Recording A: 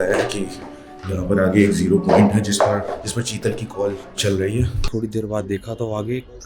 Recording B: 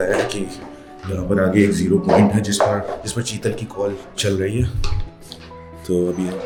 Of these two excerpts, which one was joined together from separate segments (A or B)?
A